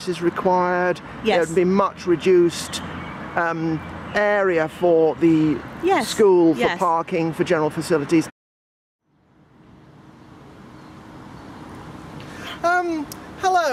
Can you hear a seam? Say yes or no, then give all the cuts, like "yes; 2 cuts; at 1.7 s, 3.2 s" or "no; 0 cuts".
no; 0 cuts